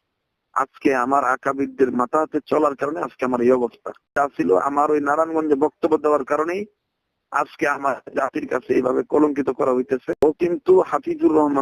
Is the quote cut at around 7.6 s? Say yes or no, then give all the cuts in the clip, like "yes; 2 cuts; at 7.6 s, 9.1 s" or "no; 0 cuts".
no; 2 cuts; at 4.1 s, 10.2 s